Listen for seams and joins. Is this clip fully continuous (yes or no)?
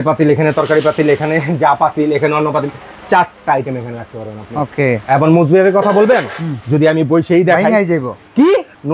yes